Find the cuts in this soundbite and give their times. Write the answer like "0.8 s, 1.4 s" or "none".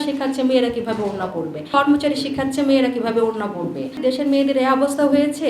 1.7 s, 4.0 s